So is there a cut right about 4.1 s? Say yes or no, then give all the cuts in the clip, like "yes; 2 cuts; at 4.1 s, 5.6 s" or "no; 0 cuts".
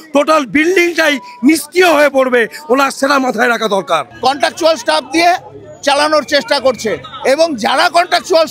yes; 1 cut; at 4.1 s